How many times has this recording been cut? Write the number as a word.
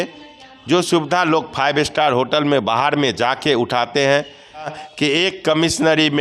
one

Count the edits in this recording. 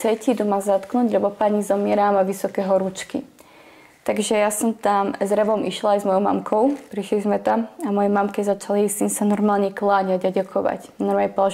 zero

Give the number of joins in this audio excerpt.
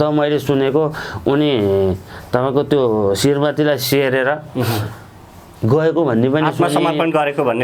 zero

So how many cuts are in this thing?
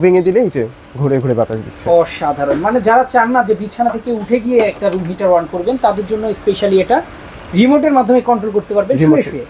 zero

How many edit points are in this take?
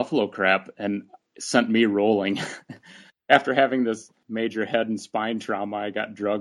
two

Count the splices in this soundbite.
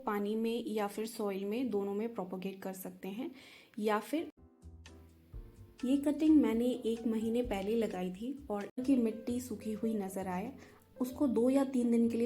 two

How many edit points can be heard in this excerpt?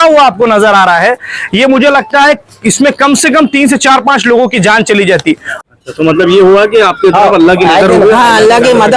one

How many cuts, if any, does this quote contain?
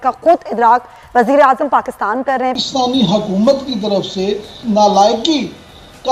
two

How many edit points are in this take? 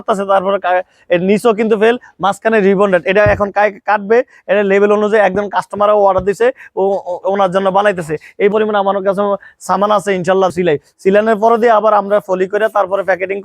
two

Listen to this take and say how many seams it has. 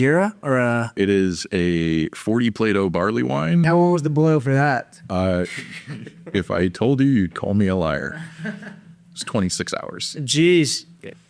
two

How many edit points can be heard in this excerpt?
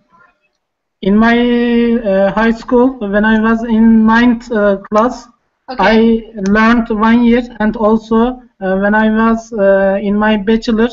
one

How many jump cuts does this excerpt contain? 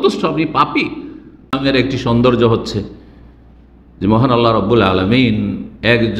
one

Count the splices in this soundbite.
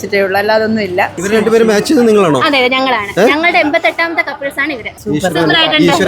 one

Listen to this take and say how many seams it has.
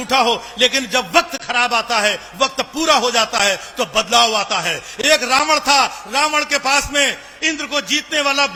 zero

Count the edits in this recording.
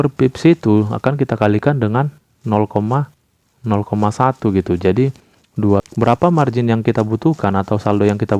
one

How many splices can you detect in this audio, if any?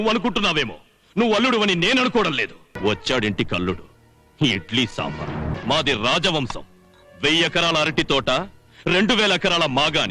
two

